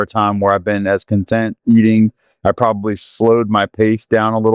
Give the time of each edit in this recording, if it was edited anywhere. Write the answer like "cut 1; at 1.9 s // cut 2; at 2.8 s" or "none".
none